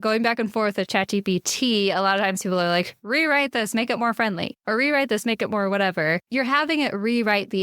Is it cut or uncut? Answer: cut